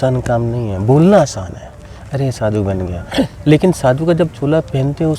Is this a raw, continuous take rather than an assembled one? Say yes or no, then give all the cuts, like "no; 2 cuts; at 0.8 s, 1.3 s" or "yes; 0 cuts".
yes; 0 cuts